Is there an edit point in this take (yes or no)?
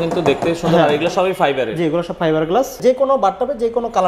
yes